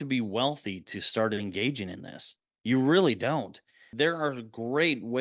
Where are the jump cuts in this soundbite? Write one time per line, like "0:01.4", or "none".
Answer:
0:03.9